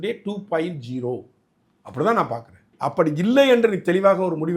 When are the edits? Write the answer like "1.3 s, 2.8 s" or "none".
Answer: 2.7 s